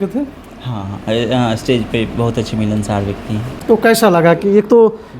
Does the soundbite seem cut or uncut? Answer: cut